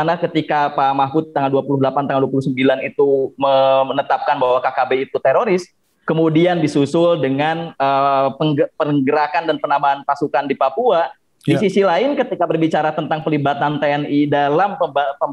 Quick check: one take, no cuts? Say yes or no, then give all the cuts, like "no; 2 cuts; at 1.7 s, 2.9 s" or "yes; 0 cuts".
yes; 0 cuts